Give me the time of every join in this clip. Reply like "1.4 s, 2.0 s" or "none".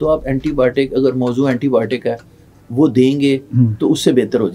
none